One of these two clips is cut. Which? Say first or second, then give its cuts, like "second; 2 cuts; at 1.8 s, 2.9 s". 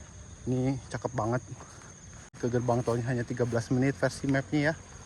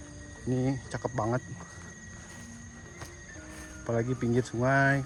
first; 1 cut; at 2.3 s